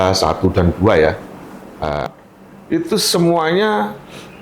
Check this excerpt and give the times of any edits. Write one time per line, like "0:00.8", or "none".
0:02.0

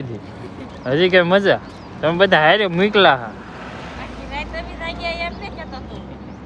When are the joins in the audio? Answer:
none

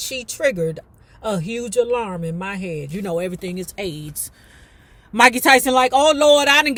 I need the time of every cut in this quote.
none

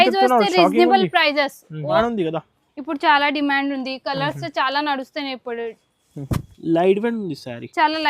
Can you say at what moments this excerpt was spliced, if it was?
0:02.0

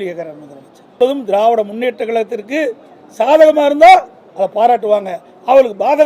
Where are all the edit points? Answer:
0:01.0

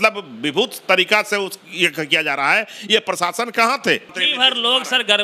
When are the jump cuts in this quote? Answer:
0:04.2

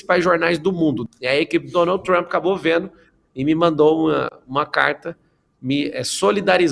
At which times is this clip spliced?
0:01.0

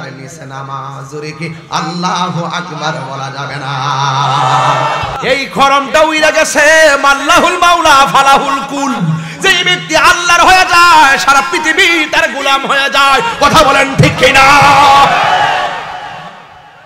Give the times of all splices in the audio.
0:05.1

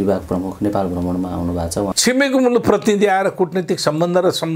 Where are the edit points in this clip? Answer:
0:01.9

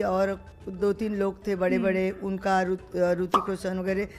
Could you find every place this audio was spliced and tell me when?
none

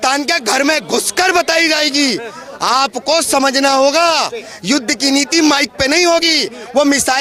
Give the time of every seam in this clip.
none

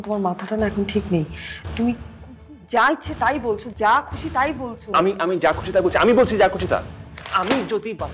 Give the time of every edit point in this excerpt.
0:06.9

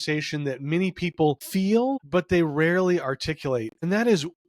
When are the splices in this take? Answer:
0:01.7

